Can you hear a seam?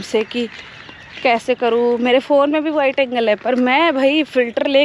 no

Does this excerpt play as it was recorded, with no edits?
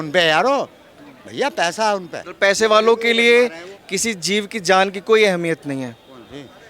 no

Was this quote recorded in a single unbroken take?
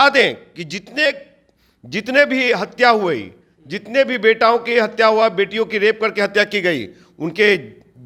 yes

